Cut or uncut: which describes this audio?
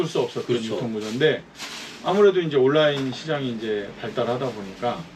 uncut